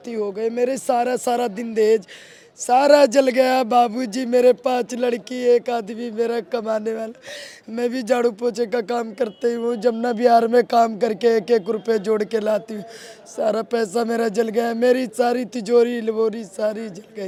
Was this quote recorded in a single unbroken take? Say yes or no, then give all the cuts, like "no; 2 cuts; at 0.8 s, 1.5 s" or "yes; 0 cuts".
yes; 0 cuts